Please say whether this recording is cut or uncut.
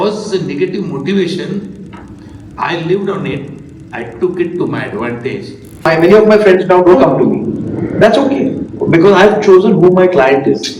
cut